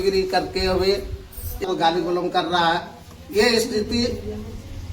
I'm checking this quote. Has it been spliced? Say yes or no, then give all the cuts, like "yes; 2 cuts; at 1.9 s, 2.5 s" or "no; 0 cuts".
yes; 1 cut; at 1.6 s